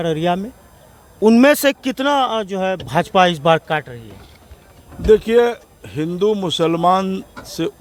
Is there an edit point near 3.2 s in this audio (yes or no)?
no